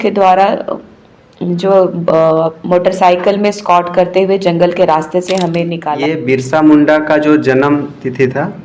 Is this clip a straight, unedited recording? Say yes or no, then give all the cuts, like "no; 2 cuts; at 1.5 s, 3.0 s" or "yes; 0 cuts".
no; 1 cut; at 5.9 s